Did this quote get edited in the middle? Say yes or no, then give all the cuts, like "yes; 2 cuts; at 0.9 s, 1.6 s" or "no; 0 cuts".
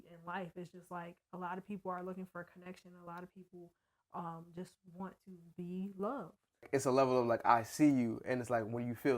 yes; 1 cut; at 6.7 s